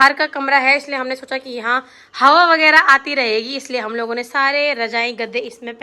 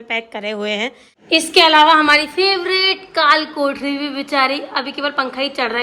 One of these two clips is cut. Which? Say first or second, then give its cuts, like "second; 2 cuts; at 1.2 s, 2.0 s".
second; 1 cut; at 1.1 s